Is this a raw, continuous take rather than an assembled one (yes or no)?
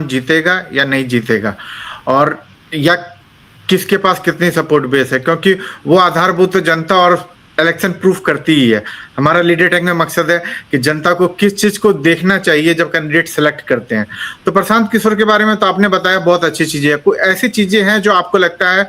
yes